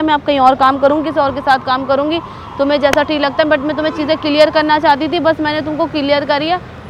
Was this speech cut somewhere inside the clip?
no; 0 cuts

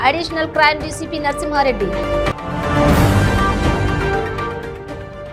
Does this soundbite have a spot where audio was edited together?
no; 0 cuts

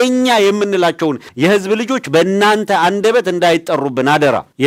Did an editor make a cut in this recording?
no; 0 cuts

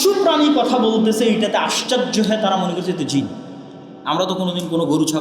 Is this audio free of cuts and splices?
yes; 0 cuts

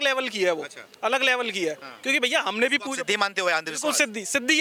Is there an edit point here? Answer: no; 0 cuts

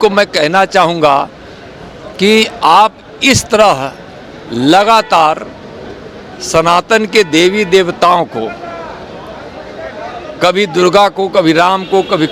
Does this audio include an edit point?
no; 0 cuts

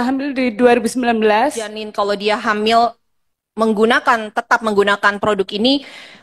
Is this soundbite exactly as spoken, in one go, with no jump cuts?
no; 1 cut; at 1.8 s

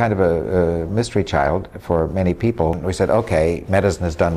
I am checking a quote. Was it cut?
yes; 1 cut; at 2.8 s

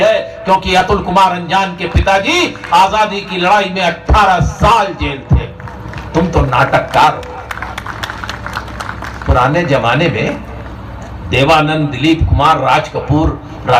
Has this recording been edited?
yes; 1 cut; at 6.0 s

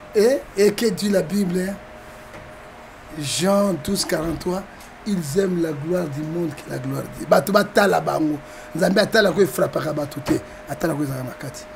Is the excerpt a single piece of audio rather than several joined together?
yes; 0 cuts

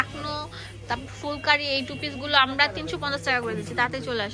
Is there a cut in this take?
no; 0 cuts

